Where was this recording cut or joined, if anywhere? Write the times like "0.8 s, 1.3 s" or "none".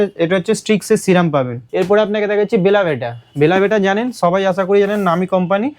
1.6 s